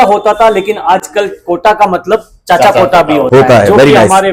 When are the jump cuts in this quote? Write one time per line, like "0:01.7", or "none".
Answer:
none